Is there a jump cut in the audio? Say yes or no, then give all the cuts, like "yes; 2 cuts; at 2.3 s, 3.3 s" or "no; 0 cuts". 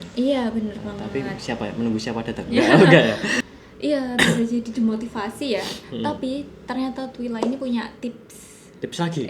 yes; 1 cut; at 3.3 s